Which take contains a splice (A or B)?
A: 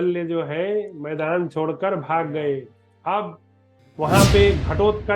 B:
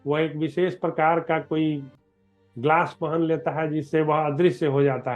A